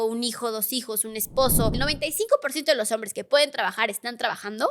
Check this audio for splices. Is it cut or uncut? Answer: cut